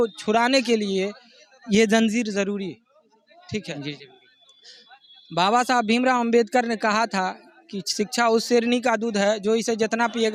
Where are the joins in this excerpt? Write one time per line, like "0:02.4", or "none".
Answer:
none